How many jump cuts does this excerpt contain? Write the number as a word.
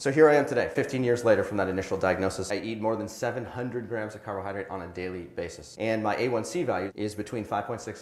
two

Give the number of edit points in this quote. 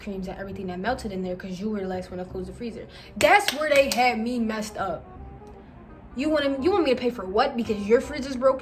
zero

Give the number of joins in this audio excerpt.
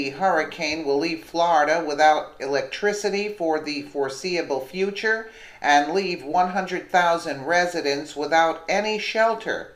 zero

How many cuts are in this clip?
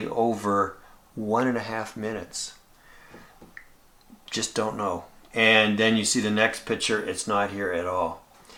zero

